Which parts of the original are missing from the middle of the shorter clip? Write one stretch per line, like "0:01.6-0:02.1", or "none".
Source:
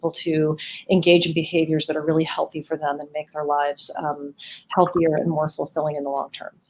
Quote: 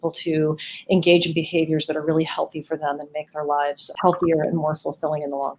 0:03.9-0:04.6